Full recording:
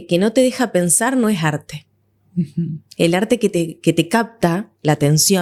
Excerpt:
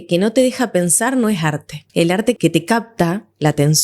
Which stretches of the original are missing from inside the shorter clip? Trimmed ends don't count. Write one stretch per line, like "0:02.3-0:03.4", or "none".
0:02.3-0:03.7